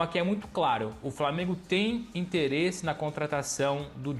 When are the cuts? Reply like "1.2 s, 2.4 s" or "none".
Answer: none